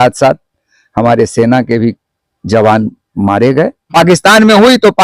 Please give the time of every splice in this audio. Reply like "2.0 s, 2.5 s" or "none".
3.9 s